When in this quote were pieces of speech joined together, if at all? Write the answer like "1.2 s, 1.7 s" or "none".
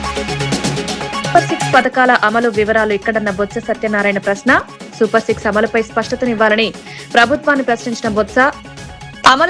none